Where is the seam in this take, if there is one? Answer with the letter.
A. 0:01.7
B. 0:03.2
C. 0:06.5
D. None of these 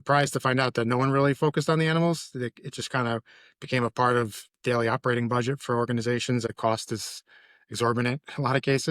C